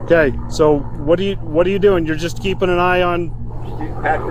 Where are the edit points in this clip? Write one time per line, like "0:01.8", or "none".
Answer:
none